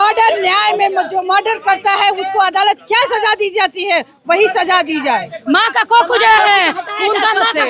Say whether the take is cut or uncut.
cut